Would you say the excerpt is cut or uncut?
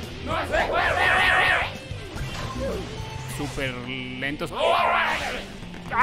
cut